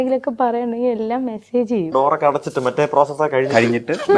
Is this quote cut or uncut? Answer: cut